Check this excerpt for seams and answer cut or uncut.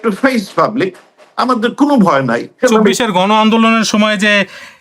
cut